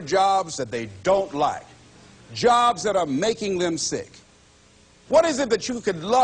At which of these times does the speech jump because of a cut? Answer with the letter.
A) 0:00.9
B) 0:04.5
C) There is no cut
B